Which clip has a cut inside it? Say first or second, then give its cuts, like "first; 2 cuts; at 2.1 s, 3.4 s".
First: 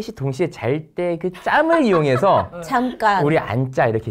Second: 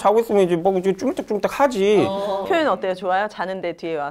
second; 1 cut; at 2.5 s